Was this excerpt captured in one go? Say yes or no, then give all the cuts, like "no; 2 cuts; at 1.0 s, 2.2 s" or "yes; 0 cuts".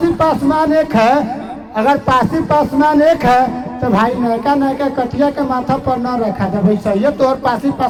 yes; 0 cuts